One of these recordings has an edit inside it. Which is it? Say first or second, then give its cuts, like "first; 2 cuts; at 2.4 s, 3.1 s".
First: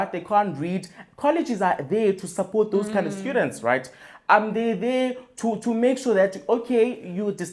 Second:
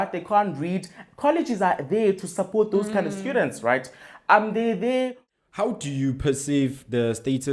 second; 1 cut; at 5.2 s